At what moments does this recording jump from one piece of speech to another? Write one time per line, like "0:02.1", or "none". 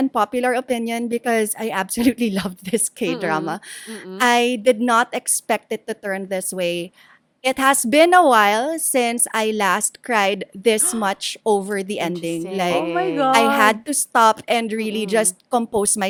none

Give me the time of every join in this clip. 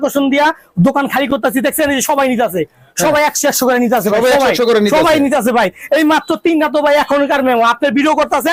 none

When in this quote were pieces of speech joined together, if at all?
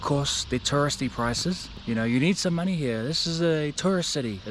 0:01.7

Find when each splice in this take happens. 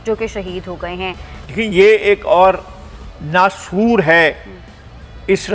0:01.3

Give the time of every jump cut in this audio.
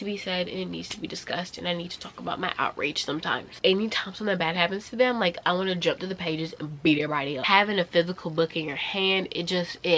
0:03.6
0:07.4

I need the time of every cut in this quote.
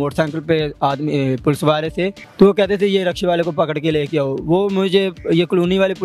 0:02.2

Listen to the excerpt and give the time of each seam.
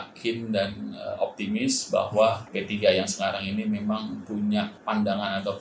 0:02.5
0:04.8

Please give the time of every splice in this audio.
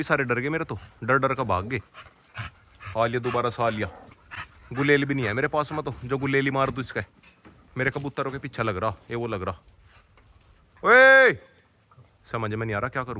none

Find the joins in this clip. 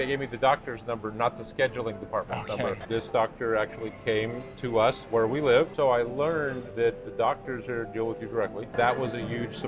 0:02.8
0:05.0
0:05.7
0:06.6
0:08.7

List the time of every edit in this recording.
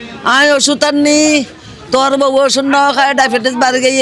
none

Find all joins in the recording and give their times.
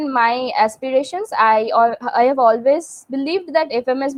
none

